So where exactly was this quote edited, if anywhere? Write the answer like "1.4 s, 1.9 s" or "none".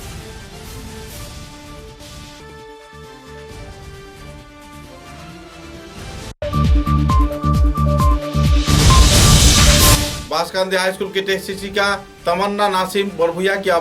6.3 s, 10.0 s